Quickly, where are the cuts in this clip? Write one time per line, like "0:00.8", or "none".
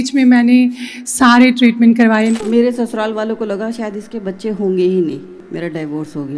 0:02.3
0:05.4